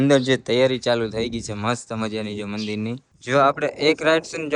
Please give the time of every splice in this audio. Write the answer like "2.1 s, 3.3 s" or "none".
3.1 s